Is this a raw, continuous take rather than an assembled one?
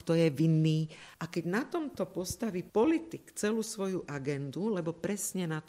yes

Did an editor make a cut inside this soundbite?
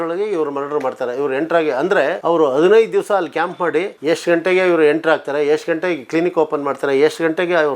yes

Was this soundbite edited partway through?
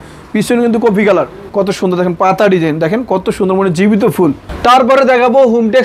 yes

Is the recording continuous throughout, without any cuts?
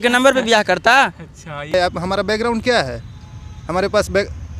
no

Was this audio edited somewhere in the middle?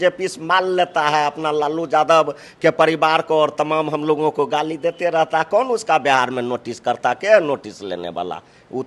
no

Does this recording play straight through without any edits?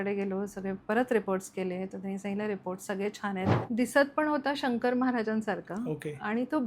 no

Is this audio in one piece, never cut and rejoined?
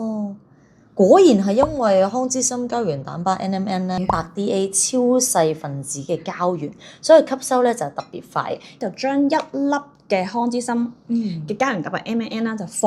no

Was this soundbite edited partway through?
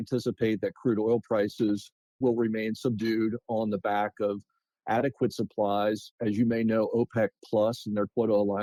no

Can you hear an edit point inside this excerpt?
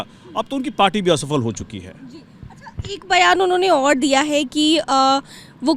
no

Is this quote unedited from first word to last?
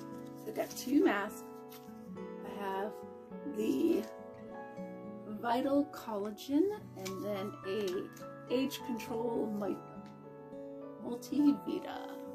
no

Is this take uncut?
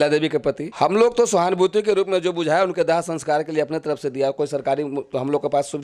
yes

